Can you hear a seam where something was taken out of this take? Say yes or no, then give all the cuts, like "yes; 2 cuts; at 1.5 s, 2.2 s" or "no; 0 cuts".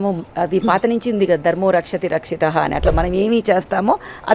no; 0 cuts